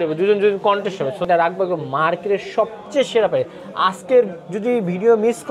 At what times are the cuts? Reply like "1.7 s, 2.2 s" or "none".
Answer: 1.3 s